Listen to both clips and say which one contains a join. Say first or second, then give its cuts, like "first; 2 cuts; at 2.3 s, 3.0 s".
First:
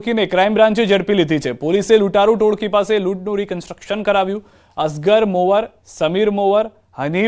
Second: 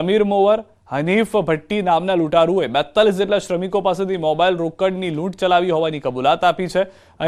first; 1 cut; at 3.0 s